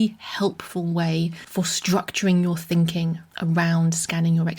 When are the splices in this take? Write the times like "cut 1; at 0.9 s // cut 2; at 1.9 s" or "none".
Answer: cut 1; at 1.4 s